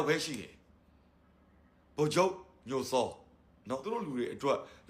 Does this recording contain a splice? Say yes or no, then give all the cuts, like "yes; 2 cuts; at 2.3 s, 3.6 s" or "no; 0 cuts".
yes; 1 cut; at 3.8 s